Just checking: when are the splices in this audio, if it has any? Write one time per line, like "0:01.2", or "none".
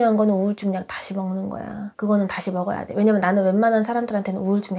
none